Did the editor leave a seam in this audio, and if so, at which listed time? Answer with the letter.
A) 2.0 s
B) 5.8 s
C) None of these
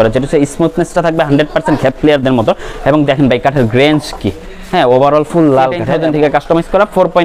B